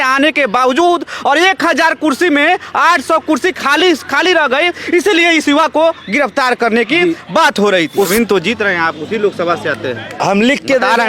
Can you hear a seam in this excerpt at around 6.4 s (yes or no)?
no